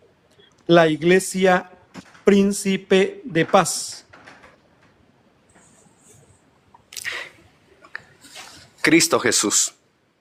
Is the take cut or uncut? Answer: uncut